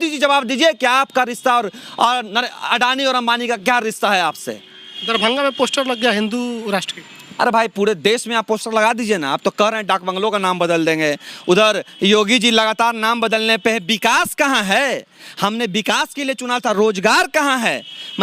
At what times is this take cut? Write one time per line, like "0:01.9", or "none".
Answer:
none